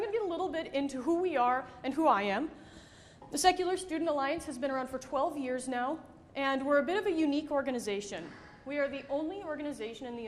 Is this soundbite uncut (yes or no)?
no